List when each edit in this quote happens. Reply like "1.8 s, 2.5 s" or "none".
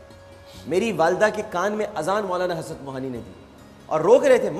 3.7 s